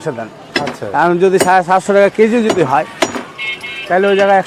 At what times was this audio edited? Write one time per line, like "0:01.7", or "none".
none

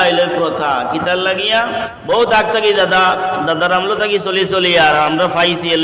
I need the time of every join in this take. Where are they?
0:01.9

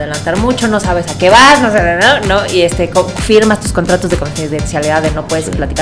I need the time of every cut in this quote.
none

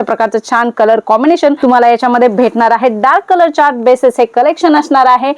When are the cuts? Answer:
none

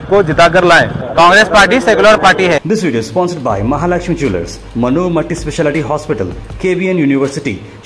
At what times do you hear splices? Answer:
0:00.9
0:02.6

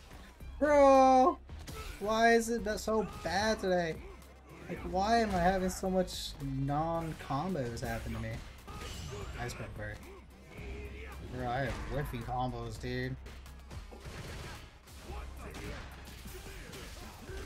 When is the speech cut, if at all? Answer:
0:08.6
0:13.3

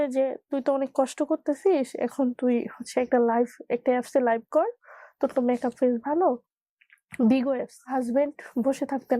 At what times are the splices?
0:06.5
0:07.8

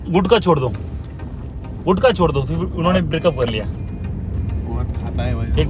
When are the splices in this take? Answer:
none

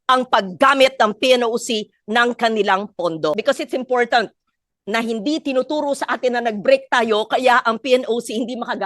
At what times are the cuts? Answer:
0:03.4

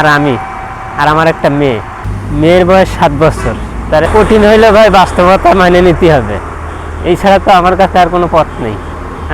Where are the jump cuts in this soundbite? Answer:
0:02.0
0:04.0

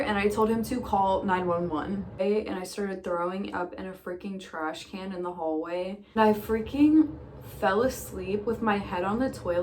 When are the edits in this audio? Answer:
0:02.2
0:06.2

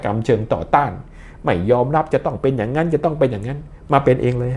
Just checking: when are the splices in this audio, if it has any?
none

